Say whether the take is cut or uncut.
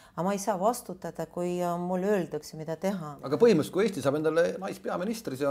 cut